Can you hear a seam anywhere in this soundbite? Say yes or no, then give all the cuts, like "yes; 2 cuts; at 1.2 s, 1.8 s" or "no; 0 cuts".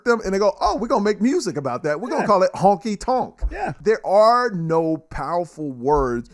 yes; 1 cut; at 3.8 s